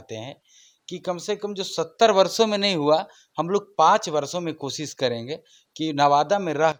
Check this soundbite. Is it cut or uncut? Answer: uncut